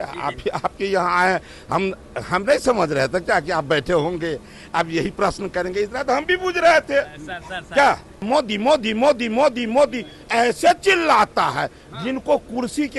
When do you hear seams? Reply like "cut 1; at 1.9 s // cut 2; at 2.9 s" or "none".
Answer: cut 1; at 8.2 s